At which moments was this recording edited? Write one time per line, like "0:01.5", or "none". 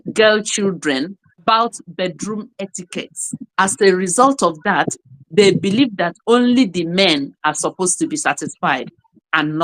none